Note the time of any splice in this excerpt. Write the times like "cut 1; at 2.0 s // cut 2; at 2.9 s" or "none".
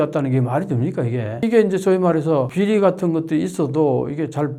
none